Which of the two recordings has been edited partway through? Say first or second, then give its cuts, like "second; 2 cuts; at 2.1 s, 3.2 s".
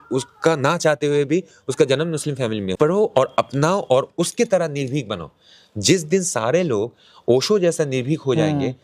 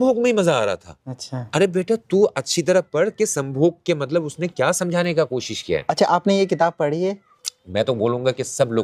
first; 1 cut; at 2.8 s